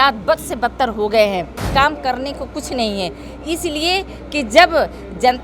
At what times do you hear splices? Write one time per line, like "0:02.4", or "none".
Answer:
0:01.7